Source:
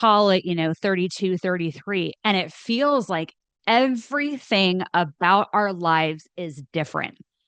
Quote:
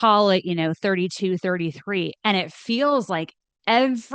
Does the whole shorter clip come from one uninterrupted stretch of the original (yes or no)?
yes